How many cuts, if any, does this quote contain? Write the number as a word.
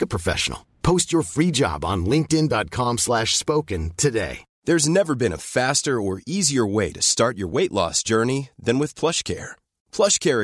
one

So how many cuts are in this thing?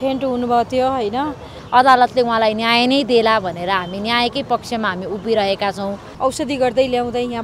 two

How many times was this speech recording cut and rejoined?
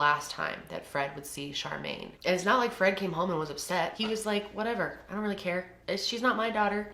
three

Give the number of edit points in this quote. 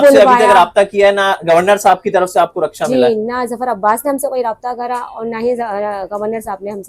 zero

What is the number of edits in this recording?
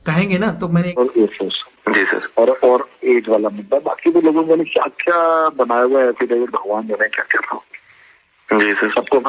one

